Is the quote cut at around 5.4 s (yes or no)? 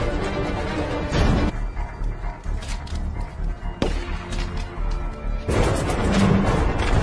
yes